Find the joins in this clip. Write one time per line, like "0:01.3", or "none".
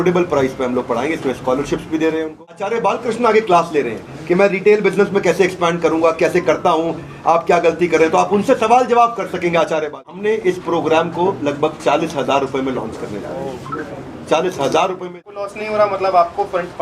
0:02.7
0:10.3
0:15.2